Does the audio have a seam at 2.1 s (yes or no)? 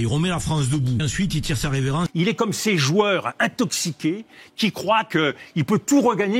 yes